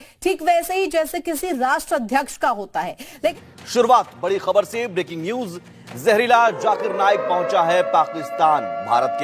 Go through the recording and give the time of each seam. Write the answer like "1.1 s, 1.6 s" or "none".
3.3 s